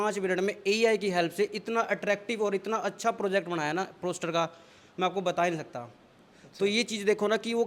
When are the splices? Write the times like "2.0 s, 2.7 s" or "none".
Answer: none